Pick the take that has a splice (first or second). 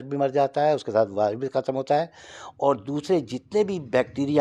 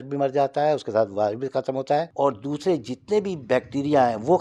second